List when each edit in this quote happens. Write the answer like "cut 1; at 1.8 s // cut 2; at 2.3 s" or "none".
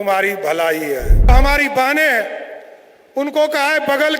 cut 1; at 1.3 s